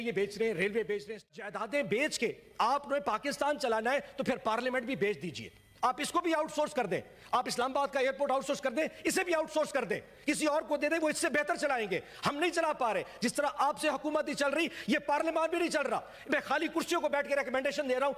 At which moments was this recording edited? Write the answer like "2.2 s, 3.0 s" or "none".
1.3 s